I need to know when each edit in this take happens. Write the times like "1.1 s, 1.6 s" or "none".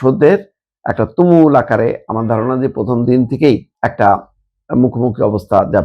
3.7 s